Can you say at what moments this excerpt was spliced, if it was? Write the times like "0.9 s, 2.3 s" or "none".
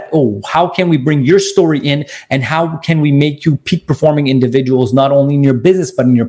none